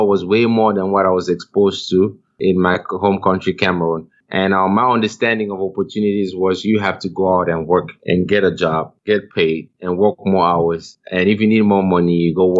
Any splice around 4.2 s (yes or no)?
yes